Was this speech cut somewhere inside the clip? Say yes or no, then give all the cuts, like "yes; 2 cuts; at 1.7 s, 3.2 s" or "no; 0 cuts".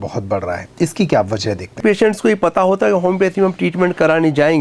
yes; 1 cut; at 1.8 s